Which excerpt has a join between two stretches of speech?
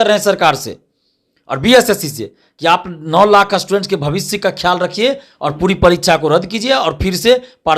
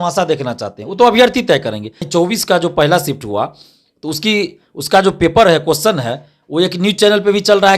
second; 1 cut; at 2.1 s

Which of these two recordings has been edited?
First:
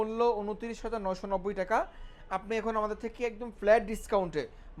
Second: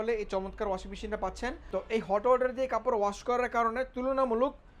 second; 1 cut; at 1.6 s

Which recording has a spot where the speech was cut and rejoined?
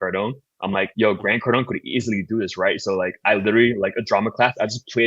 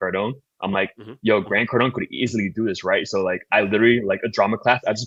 first; 1 cut; at 0.9 s

